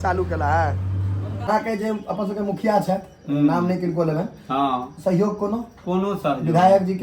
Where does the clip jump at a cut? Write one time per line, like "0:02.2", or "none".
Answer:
0:01.5

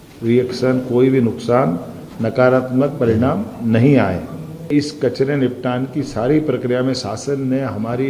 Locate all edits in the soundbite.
0:04.7

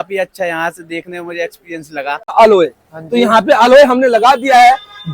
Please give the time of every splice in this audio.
0:02.3

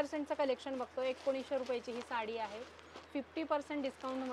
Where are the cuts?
none

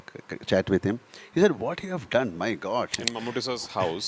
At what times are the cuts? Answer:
0:03.0

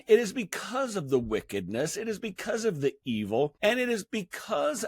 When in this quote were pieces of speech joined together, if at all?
0:03.5

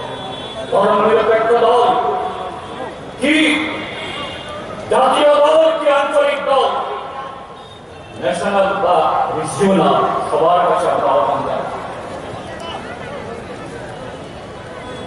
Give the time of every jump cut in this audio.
0:01.0

